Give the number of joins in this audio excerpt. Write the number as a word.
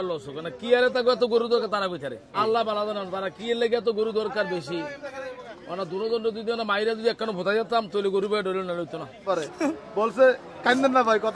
two